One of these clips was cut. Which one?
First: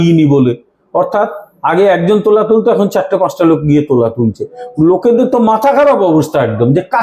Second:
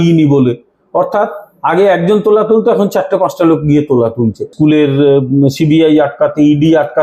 second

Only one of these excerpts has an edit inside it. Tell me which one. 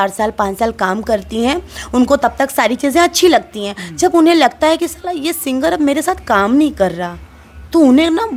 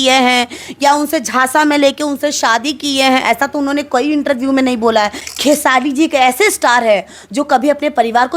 second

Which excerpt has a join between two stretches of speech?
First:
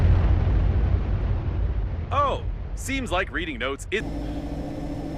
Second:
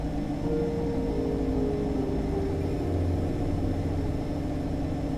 first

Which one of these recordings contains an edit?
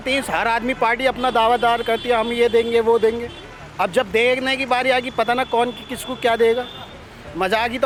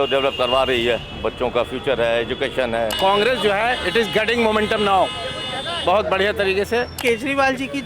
second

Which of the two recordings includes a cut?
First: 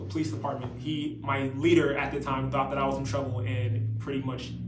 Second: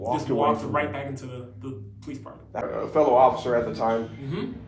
second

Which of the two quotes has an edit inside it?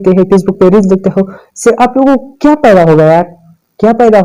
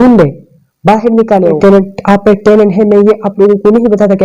second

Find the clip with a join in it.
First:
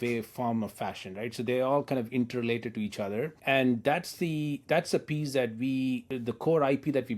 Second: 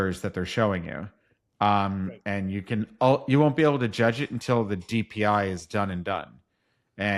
first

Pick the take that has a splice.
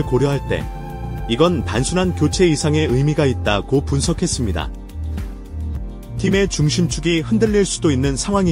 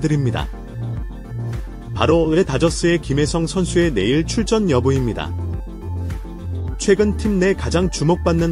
first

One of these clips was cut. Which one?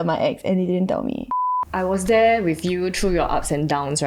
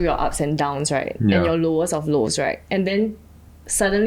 first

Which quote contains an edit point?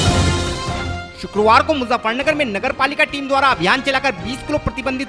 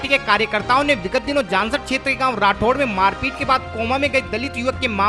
first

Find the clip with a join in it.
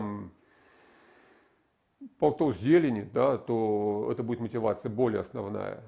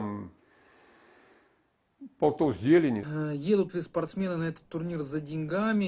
second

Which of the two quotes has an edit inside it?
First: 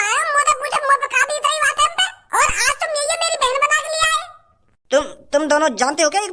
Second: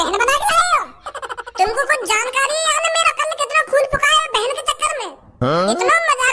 first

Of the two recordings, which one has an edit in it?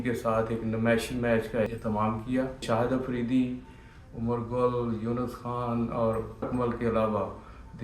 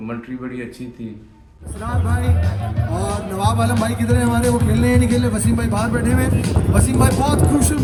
first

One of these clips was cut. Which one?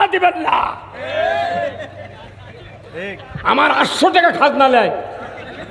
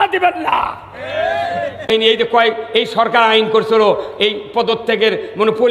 first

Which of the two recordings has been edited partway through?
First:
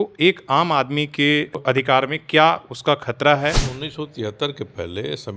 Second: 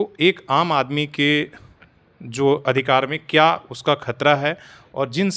first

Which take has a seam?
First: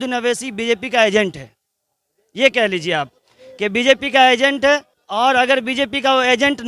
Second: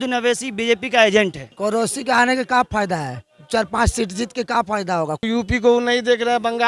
second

